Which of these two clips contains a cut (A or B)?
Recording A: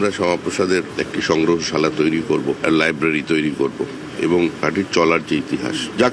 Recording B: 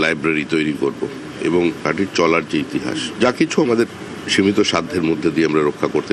A